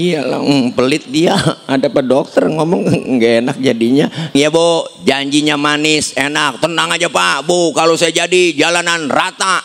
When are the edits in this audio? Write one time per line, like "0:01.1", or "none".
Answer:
0:04.3